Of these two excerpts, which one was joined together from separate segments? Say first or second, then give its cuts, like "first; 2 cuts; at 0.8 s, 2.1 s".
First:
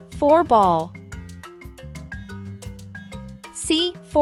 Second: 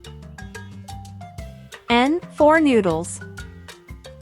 second; 2 cuts; at 1.5 s, 3.1 s